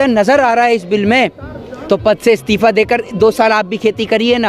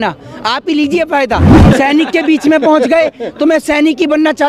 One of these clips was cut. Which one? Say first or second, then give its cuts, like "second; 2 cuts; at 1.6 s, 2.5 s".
second; 1 cut; at 1.6 s